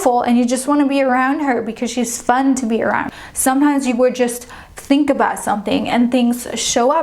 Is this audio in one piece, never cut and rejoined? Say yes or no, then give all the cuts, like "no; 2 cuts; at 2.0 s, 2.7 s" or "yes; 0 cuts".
no; 1 cut; at 3.1 s